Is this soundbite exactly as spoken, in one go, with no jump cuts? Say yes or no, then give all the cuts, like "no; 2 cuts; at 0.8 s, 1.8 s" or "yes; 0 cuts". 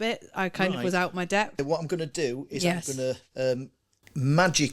no; 1 cut; at 1.6 s